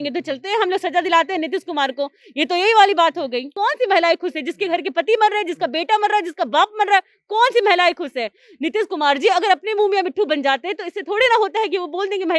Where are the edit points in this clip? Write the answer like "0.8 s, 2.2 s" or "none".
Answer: 3.5 s